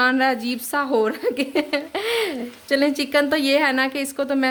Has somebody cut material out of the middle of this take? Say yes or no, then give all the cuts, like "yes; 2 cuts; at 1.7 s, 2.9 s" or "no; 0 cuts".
no; 0 cuts